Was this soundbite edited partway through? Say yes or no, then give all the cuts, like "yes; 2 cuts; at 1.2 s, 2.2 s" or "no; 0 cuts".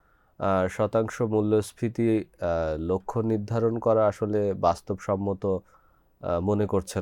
no; 0 cuts